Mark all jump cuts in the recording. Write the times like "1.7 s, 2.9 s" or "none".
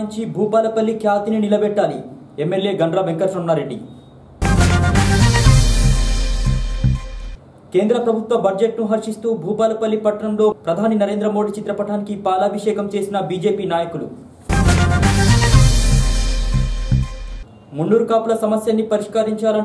none